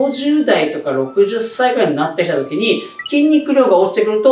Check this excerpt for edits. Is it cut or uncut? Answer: uncut